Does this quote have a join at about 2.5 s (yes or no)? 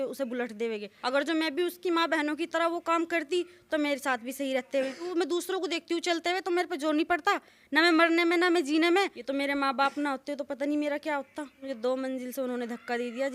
no